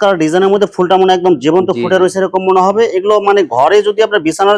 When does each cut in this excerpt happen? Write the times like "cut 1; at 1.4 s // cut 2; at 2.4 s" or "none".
none

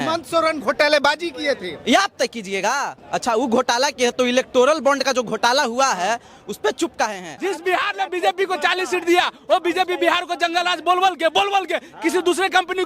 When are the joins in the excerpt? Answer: cut 1; at 3.0 s // cut 2; at 7.3 s

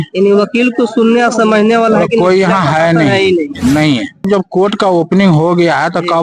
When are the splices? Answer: cut 1; at 4.2 s

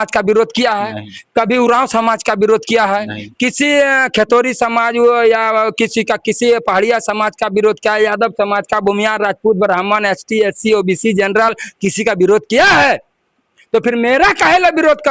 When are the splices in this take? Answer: none

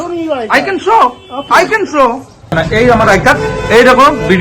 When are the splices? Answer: cut 1; at 2.5 s

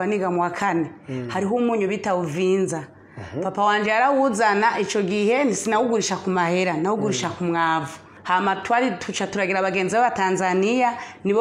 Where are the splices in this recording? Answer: cut 1; at 8.1 s

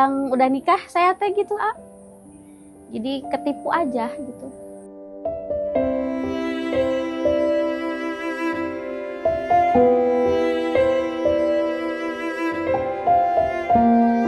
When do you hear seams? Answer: none

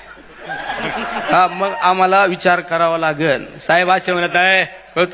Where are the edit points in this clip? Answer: none

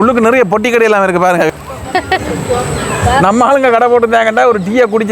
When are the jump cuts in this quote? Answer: cut 1; at 1.5 s

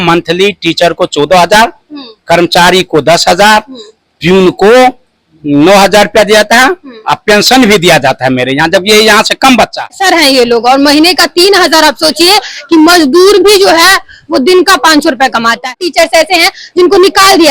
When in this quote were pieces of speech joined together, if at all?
cut 1; at 10.0 s // cut 2; at 15.7 s

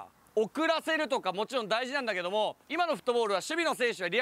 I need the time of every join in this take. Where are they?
cut 1; at 2.6 s

